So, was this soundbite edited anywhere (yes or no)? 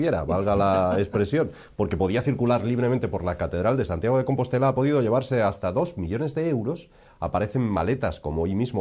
yes